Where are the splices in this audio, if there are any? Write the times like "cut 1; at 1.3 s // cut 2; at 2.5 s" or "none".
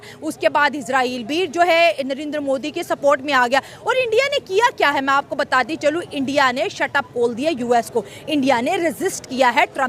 none

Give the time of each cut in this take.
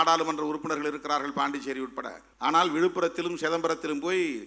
cut 1; at 2.2 s

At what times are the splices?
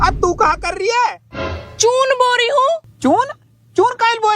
cut 1; at 2.9 s

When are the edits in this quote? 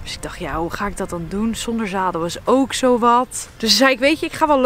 cut 1; at 3.4 s

